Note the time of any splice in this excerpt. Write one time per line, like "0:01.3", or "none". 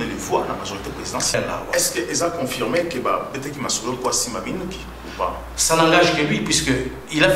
0:01.3